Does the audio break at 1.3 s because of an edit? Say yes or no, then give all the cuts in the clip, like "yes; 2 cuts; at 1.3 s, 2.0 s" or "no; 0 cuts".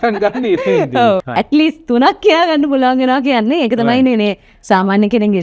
yes; 1 cut; at 1.3 s